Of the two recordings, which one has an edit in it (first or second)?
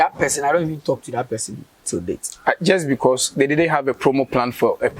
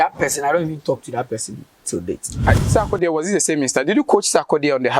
second